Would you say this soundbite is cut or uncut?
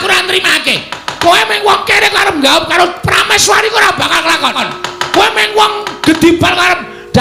uncut